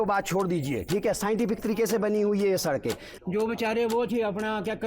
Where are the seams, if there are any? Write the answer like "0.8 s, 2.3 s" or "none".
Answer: 3.1 s